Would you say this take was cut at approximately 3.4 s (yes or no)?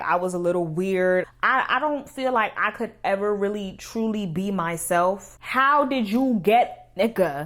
no